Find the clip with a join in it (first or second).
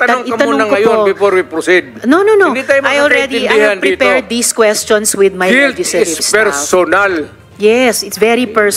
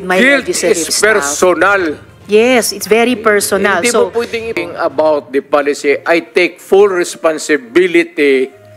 second